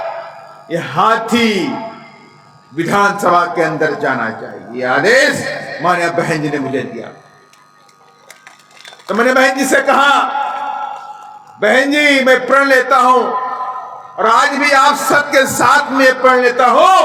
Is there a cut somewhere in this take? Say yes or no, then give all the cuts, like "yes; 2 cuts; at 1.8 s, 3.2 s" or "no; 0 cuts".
no; 0 cuts